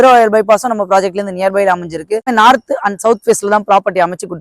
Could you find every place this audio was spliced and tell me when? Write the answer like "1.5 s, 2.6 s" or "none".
2.3 s